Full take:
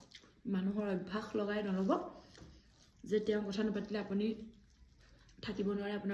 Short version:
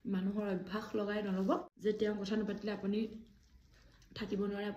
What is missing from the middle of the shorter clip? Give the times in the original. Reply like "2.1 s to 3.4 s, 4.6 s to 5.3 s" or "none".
2.1 s to 3.0 s